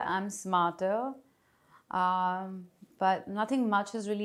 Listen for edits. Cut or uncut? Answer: uncut